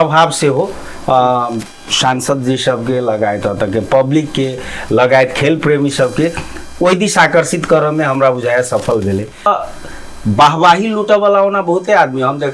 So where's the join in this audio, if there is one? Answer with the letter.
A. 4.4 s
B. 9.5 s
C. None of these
B